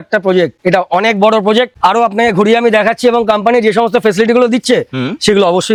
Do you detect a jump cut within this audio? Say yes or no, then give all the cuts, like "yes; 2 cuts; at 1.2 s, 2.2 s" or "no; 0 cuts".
no; 0 cuts